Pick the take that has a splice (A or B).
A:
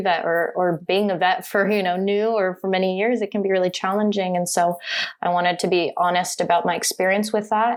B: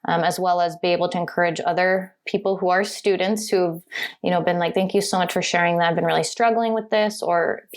B